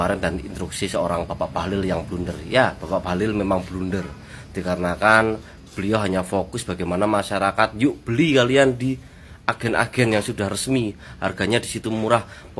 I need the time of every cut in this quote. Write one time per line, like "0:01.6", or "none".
none